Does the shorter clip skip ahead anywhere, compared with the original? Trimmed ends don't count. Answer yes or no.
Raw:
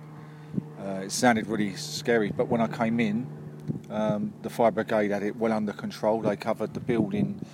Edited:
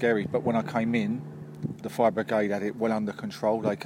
yes